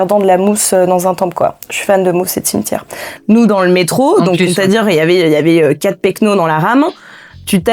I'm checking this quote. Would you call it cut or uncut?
cut